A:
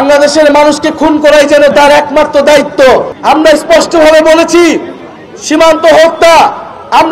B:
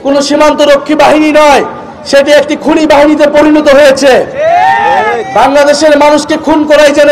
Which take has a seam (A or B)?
A